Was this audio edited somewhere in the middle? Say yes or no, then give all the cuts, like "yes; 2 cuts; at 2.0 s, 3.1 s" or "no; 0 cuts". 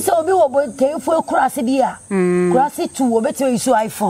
no; 0 cuts